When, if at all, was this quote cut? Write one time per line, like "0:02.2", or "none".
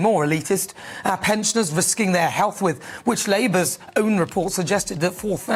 none